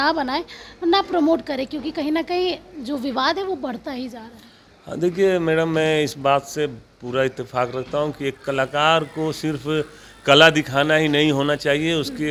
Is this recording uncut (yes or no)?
yes